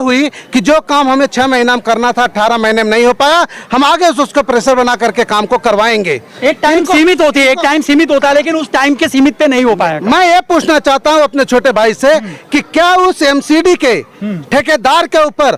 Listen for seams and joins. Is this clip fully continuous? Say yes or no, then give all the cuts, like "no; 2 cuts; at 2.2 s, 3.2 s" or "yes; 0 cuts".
yes; 0 cuts